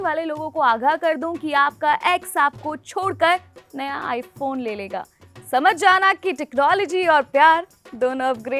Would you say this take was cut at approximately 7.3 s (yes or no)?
no